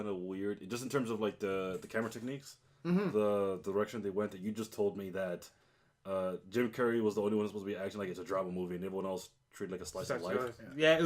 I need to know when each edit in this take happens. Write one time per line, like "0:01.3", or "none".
0:02.6